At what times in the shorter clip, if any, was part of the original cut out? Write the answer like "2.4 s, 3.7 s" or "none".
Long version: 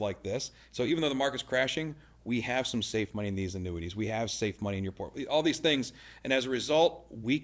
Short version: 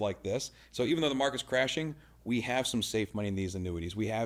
none